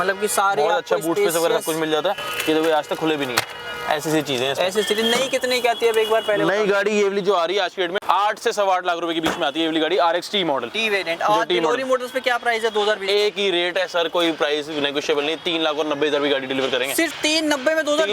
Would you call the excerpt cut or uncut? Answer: uncut